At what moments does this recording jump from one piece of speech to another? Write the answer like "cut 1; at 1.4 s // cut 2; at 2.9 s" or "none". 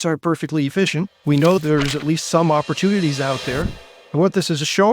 cut 1; at 1.6 s